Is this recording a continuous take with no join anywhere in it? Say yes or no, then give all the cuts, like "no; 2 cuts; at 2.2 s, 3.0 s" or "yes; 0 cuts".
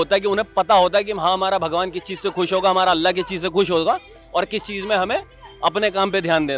yes; 0 cuts